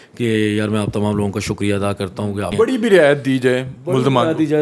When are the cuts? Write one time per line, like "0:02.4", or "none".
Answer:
0:02.7